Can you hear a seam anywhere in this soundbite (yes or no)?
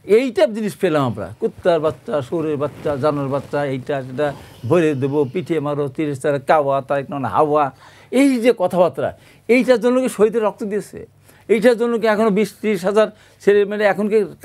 no